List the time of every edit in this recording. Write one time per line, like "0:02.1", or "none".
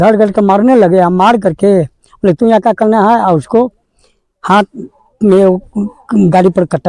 none